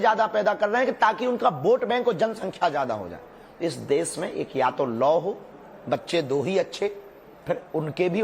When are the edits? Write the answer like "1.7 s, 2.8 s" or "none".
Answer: 6.5 s